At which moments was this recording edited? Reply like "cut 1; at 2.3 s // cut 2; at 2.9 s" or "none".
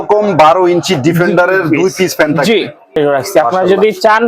cut 1; at 3.0 s